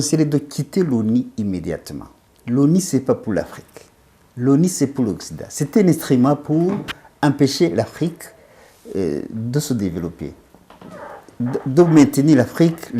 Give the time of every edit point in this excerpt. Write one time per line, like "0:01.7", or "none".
none